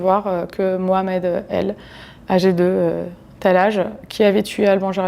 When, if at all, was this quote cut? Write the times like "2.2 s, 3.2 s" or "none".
none